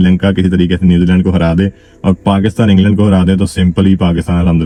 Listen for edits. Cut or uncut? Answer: uncut